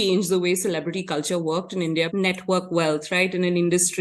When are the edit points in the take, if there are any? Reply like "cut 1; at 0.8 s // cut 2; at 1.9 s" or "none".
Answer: cut 1; at 2.1 s